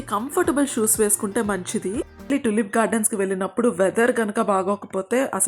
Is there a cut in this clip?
yes; 1 cut; at 2.3 s

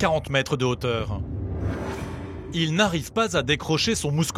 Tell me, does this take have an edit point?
yes; 1 cut; at 2.4 s

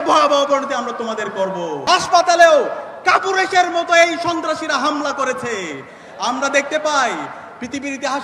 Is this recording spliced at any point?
yes; 1 cut; at 1.8 s

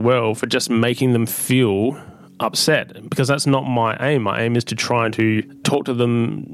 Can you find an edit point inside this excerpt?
yes; 1 cut; at 5.6 s

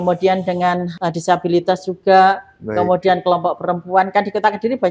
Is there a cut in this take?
yes; 1 cut; at 0.9 s

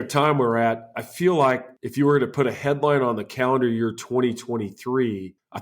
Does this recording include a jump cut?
yes; 2 cuts; at 0.9 s, 1.8 s

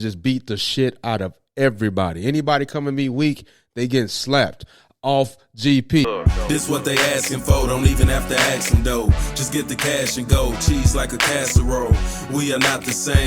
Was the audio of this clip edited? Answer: yes; 1 cut; at 6.1 s

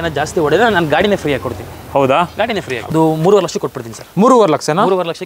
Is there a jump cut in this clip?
yes; 1 cut; at 2.8 s

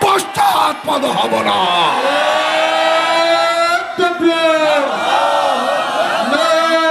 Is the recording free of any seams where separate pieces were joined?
yes; 0 cuts

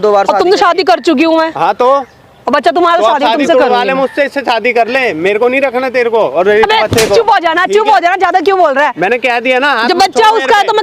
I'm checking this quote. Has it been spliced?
no; 0 cuts

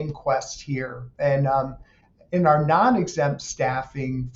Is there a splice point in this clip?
no; 0 cuts

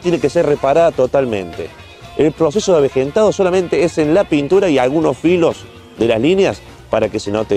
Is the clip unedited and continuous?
yes; 0 cuts

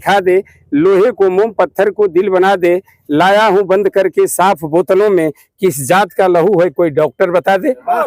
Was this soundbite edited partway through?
no; 0 cuts

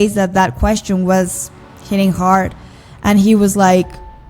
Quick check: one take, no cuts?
yes; 0 cuts

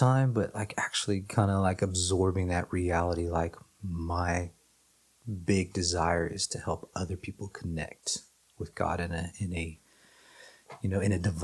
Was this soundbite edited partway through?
no; 0 cuts

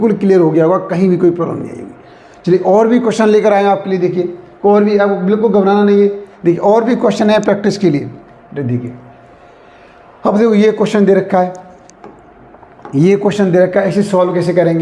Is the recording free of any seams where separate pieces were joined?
yes; 0 cuts

